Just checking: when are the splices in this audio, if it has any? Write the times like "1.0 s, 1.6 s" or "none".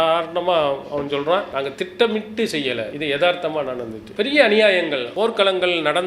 1.5 s, 2.9 s, 5.1 s